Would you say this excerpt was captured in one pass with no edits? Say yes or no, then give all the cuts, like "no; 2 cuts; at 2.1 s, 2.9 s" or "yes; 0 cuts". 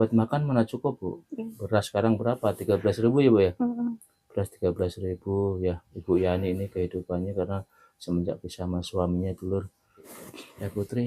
no; 1 cut; at 10.1 s